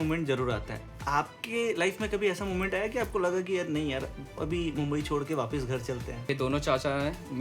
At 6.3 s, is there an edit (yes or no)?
yes